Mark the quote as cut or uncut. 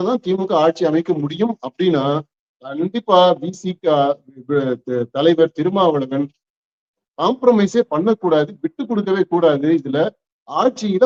uncut